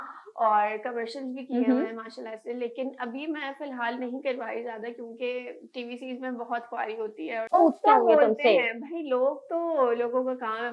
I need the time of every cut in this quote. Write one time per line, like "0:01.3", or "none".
0:07.5

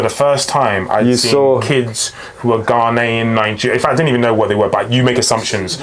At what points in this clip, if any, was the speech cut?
none

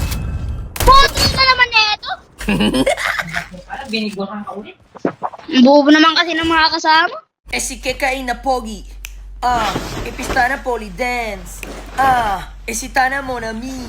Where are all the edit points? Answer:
0:07.5

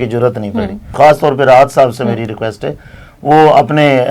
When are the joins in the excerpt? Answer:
0:00.9

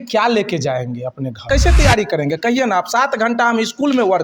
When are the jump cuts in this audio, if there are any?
0:01.5

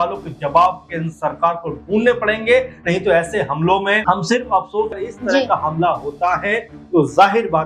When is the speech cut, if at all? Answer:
0:04.0
0:05.1

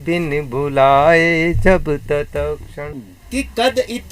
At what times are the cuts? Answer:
0:02.9

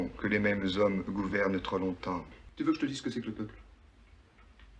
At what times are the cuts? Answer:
0:02.4

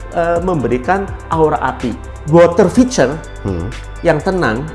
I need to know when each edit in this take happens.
0:02.1

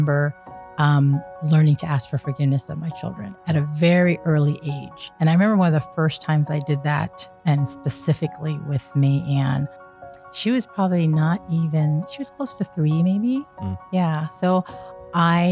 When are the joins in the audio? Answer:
0:10.0

